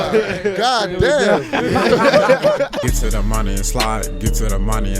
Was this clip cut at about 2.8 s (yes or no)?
yes